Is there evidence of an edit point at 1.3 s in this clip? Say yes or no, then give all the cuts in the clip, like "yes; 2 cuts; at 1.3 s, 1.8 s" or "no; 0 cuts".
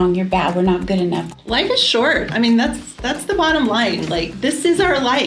yes; 1 cut; at 1.3 s